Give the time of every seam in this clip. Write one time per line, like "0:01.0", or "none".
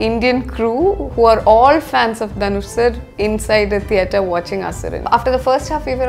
0:05.0